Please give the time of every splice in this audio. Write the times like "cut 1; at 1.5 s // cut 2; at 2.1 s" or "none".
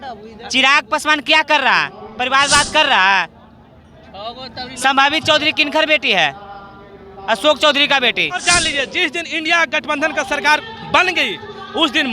cut 1; at 8.4 s